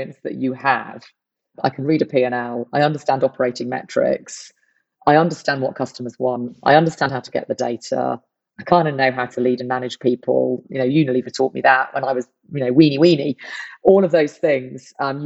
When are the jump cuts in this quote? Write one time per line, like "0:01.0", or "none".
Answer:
0:01.5